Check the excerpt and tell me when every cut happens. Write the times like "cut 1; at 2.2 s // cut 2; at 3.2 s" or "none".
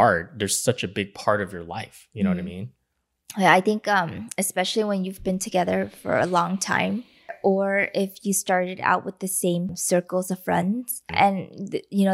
cut 1; at 7.3 s // cut 2; at 9.8 s // cut 3; at 11.1 s

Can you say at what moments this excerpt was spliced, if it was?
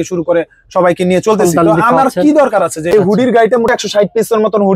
cut 1; at 2.9 s // cut 2; at 3.8 s

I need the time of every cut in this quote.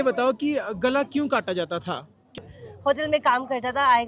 cut 1; at 2.4 s

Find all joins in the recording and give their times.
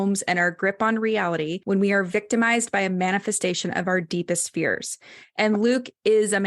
cut 1; at 1.6 s

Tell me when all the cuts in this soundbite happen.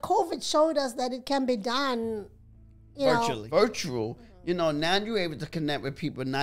cut 1; at 3.4 s

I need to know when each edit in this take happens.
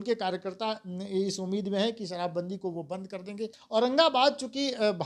cut 1; at 3.6 s

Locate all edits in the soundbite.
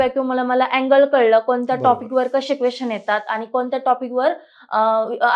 none

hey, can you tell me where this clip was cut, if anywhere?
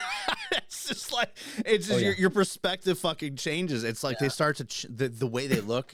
none

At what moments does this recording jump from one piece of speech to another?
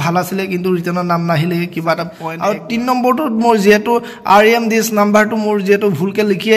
cut 1; at 2.2 s

